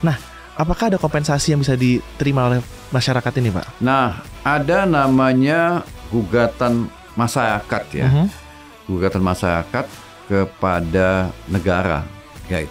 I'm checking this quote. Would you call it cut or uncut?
uncut